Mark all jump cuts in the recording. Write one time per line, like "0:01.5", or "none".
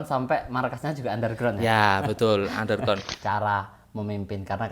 0:03.1